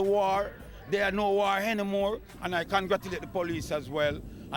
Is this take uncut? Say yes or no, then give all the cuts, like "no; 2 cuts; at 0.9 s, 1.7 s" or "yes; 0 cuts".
yes; 0 cuts